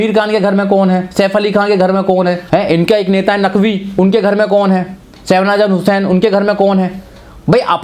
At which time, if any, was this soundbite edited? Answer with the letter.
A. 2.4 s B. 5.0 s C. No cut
A